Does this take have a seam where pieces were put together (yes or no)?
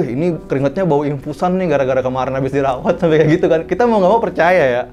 no